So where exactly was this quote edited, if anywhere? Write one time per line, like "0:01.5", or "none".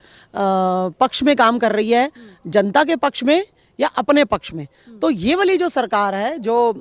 none